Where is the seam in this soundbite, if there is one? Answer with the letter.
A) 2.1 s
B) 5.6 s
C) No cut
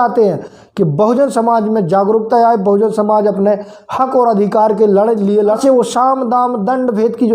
B